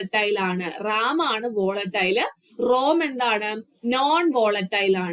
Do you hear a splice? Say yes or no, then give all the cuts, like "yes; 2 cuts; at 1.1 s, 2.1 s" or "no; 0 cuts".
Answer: no; 0 cuts